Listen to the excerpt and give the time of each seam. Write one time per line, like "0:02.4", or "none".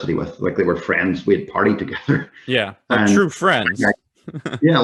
none